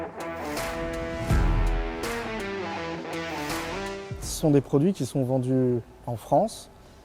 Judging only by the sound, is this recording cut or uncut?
cut